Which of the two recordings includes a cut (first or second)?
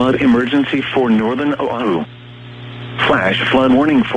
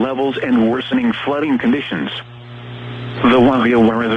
first